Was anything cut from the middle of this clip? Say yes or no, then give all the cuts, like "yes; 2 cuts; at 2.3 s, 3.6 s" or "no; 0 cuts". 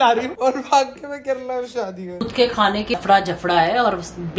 yes; 2 cuts; at 2.1 s, 3.0 s